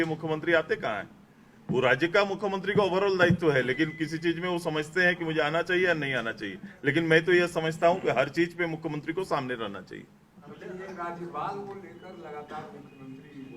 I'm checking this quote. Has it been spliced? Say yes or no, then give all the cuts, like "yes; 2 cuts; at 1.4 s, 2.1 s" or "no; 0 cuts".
no; 0 cuts